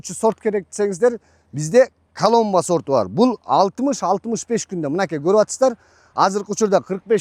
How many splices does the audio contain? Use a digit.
0